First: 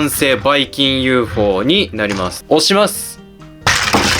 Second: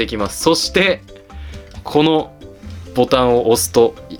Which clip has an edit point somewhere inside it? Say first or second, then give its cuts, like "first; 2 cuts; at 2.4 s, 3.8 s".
first; 1 cut; at 2.3 s